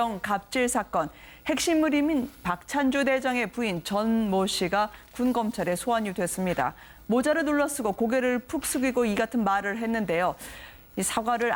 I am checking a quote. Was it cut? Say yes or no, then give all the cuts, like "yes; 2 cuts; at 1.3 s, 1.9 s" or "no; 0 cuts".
no; 0 cuts